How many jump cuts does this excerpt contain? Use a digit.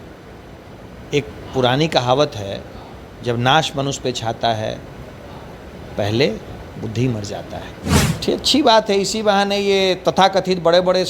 1